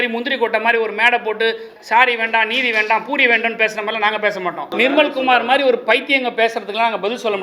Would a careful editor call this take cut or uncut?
cut